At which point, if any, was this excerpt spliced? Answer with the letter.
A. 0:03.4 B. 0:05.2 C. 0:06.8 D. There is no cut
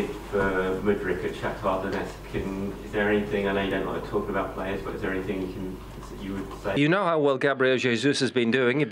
C